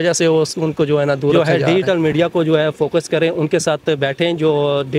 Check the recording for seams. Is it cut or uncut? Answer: cut